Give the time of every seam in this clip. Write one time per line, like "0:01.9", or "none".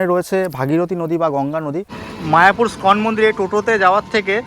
0:02.0